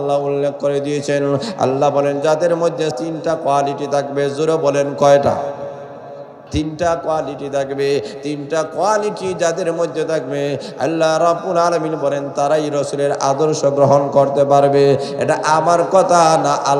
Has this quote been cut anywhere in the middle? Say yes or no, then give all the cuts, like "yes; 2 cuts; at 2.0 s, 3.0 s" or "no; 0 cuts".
yes; 2 cuts; at 3.0 s, 6.4 s